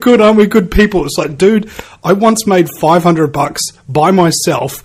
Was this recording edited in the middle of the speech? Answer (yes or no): yes